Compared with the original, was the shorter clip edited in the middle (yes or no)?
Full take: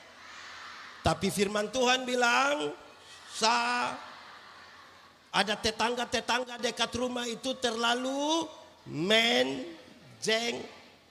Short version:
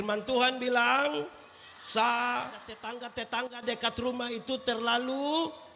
yes